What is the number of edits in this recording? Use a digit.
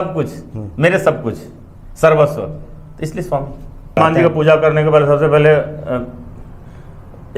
1